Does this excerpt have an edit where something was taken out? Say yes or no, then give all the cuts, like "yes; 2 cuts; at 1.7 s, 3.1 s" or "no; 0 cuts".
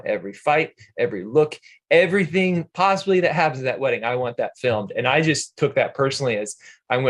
no; 0 cuts